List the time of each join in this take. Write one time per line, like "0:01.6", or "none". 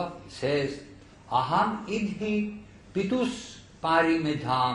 0:02.3